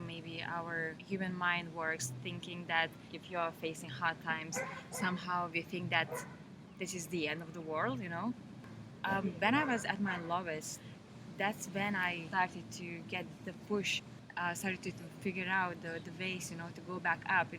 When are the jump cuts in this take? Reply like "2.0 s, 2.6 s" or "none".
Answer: 3.0 s, 8.5 s, 10.8 s